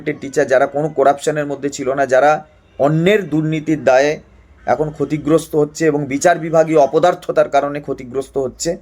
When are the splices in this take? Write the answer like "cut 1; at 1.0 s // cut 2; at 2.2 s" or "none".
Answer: none